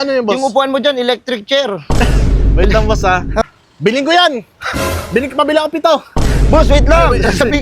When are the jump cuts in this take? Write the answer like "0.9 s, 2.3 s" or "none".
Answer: 3.4 s